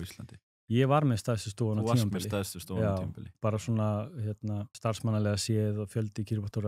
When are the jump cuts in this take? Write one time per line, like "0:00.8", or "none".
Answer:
0:04.7